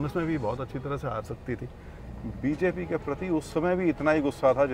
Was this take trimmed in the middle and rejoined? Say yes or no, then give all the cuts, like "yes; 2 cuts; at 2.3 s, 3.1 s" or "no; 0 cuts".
yes; 1 cut; at 2.0 s